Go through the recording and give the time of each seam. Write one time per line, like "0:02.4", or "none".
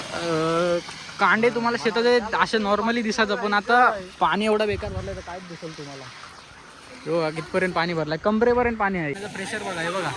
0:09.2